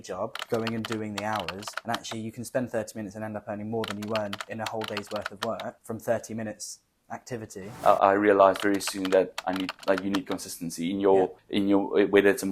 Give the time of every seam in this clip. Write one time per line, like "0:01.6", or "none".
0:07.7